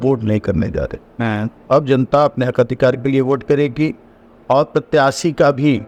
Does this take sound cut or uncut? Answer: uncut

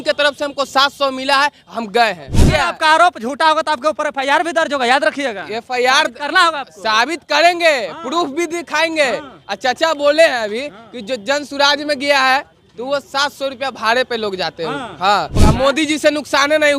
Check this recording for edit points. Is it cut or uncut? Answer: cut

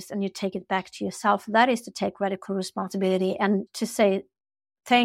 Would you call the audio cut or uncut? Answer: cut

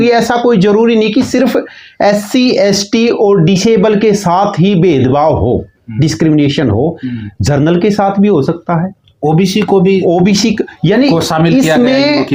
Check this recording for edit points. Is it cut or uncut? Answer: uncut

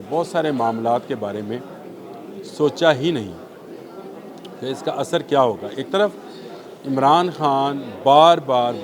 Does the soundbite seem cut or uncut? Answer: uncut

